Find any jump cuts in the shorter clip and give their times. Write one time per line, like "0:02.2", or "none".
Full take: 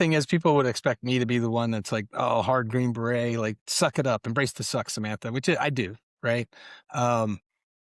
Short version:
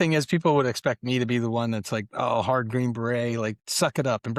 none